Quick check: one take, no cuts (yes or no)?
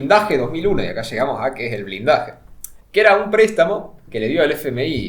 yes